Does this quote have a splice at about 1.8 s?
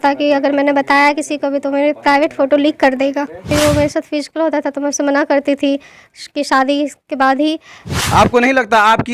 no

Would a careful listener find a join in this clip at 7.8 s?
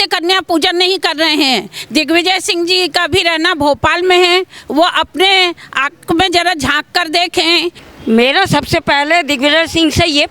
yes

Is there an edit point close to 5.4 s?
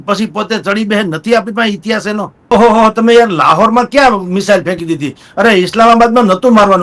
no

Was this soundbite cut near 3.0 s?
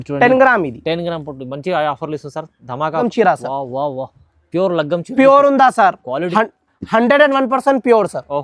yes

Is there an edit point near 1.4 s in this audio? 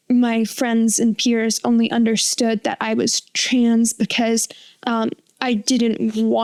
no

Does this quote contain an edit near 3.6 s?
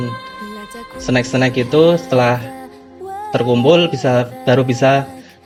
no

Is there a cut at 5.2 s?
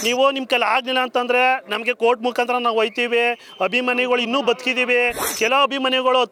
no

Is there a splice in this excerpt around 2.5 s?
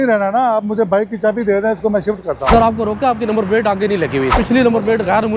yes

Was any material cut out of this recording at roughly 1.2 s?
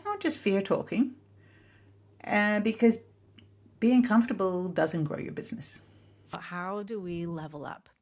no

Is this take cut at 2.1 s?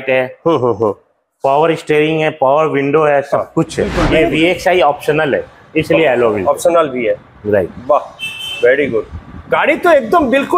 no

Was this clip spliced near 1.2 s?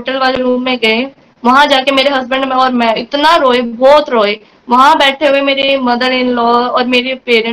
yes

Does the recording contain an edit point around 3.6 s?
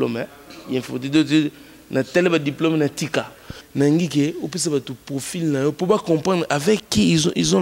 yes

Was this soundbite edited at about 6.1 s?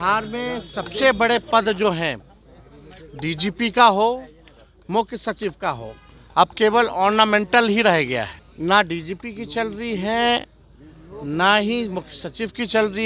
no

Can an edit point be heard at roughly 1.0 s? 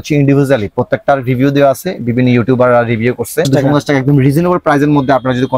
no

